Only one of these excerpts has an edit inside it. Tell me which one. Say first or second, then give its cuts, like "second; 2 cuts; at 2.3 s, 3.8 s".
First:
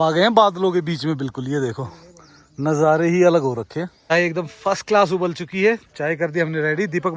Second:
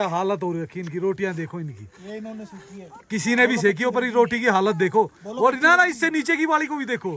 first; 1 cut; at 3.9 s